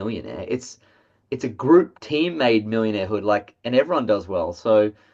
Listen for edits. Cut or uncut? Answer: uncut